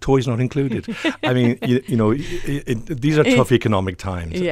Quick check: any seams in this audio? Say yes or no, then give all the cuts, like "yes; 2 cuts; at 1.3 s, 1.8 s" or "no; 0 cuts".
no; 0 cuts